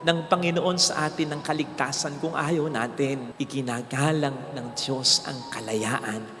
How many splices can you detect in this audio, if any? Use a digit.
0